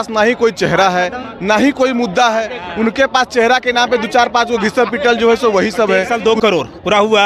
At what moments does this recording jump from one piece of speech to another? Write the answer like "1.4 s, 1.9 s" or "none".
6.1 s